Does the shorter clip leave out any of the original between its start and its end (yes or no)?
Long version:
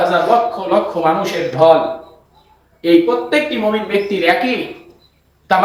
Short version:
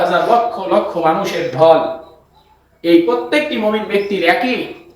no